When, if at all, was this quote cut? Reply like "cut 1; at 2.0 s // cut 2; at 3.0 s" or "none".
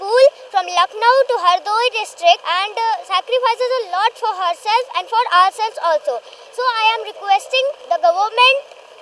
cut 1; at 2.5 s // cut 2; at 7.8 s